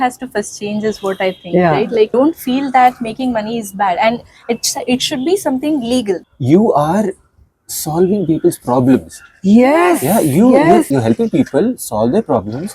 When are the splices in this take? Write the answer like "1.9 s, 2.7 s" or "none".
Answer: 2.1 s, 6.2 s, 10.9 s